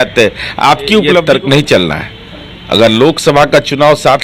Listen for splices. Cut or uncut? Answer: cut